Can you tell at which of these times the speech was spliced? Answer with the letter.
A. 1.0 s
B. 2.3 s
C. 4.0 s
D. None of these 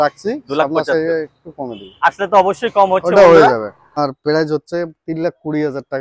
C